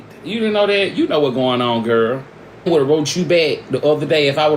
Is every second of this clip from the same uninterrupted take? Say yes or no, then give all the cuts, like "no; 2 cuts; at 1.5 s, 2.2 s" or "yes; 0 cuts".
no; 1 cut; at 2.7 s